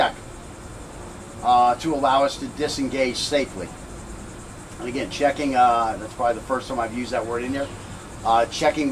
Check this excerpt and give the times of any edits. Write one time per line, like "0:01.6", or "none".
0:02.4